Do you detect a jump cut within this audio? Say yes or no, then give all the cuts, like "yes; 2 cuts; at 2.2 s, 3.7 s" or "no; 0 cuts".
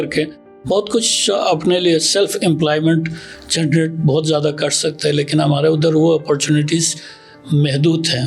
no; 0 cuts